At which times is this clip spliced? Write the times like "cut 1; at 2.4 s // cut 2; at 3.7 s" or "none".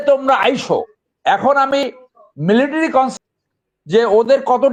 none